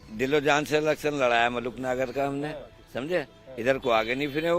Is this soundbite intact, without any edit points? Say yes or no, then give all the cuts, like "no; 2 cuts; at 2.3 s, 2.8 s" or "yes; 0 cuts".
yes; 0 cuts